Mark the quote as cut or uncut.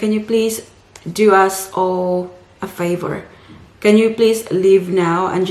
uncut